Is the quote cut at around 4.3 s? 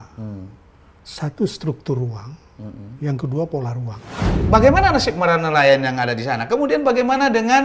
yes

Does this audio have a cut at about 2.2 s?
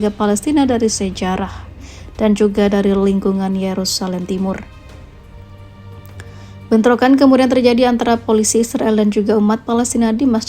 no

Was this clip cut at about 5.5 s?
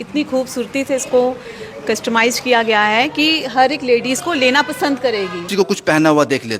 yes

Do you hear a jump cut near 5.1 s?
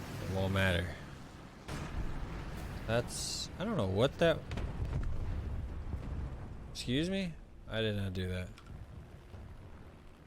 no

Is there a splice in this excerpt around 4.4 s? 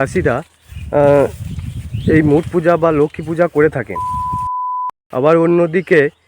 yes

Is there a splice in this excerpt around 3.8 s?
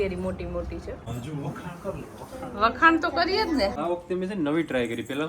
yes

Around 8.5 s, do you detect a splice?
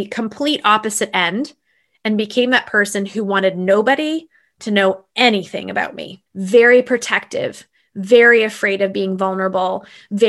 no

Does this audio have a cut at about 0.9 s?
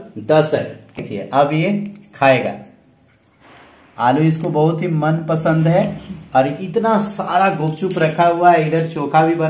yes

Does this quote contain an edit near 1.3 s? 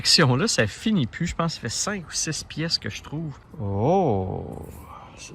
no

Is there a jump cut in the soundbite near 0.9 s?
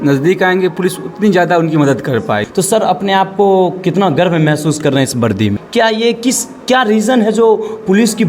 no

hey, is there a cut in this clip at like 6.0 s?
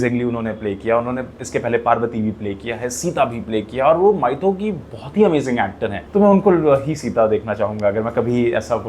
yes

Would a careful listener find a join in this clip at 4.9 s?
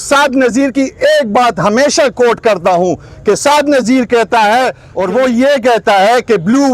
yes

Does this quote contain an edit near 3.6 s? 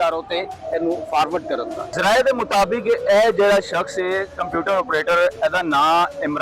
no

